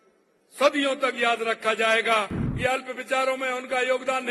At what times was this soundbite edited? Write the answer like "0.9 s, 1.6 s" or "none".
2.4 s